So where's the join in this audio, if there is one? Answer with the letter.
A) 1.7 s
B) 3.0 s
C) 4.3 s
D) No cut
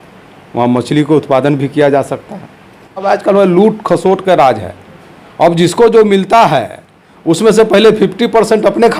B